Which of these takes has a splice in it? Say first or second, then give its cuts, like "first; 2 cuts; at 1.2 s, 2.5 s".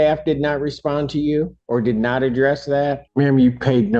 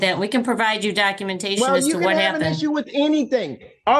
first; 2 cuts; at 1.6 s, 3.0 s